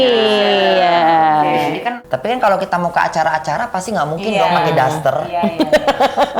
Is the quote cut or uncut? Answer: cut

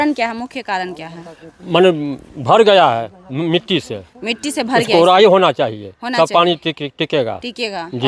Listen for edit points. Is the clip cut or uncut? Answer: uncut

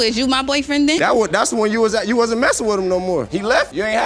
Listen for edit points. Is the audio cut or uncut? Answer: uncut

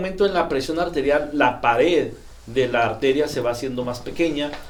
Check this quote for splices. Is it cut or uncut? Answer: uncut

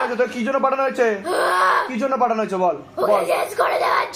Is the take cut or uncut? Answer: uncut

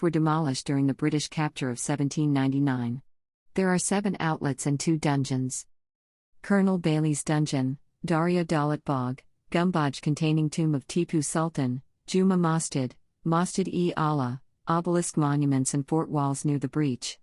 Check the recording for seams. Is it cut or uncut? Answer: cut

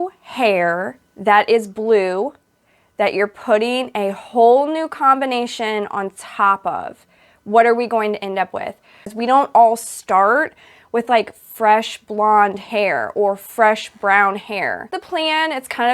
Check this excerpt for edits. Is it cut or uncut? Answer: cut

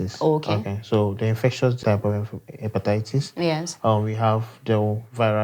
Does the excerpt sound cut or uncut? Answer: cut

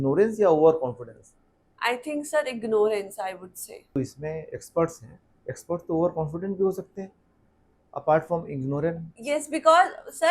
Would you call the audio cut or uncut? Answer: cut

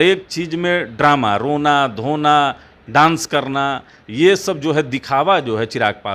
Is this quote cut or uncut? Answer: uncut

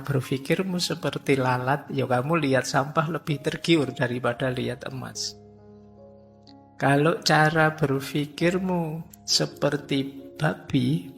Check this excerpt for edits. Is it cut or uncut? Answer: cut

